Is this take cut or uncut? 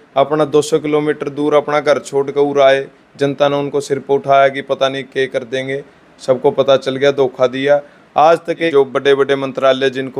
cut